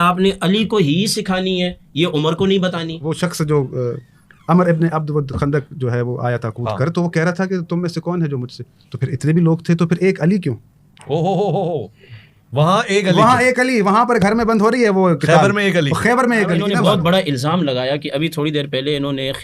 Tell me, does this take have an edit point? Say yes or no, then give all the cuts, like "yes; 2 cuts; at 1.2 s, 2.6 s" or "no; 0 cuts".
yes; 2 cuts; at 2.6 s, 16.6 s